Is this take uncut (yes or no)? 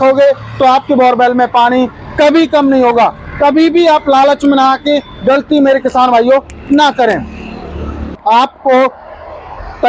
no